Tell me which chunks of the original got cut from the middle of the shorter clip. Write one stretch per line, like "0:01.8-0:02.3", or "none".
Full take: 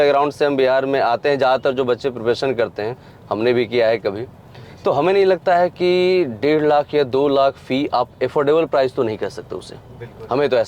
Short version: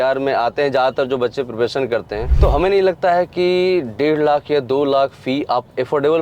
0:02.9-0:04.6